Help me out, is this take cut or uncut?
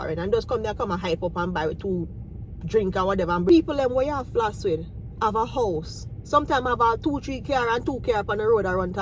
cut